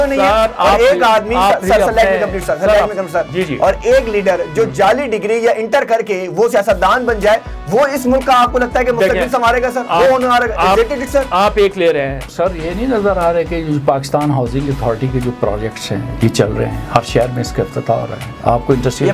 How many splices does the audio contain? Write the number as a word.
one